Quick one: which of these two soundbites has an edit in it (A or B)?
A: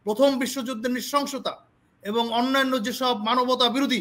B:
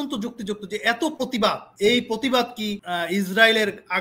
B